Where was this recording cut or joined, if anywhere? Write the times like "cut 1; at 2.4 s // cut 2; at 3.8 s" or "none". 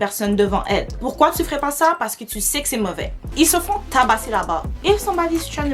cut 1; at 1.0 s // cut 2; at 3.2 s

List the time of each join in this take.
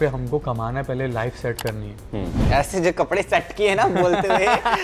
cut 1; at 2.4 s

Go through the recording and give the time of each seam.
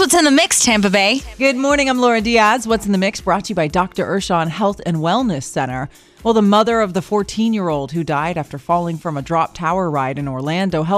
cut 1; at 1.3 s

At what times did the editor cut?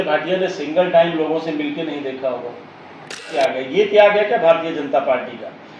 cut 1; at 3.3 s

